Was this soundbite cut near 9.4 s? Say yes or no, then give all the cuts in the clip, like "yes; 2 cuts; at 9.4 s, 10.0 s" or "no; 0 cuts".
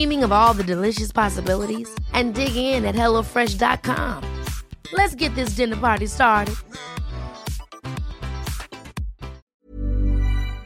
yes; 1 cut; at 9.4 s